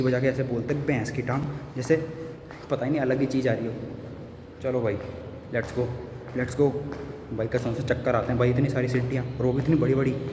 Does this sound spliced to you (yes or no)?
no